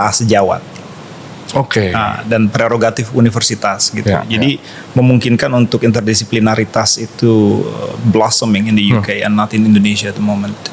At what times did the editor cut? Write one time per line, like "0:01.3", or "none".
none